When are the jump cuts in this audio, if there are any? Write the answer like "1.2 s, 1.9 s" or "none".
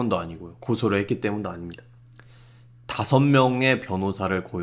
none